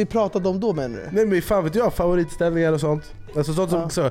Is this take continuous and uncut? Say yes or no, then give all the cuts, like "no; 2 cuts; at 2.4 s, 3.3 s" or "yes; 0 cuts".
yes; 0 cuts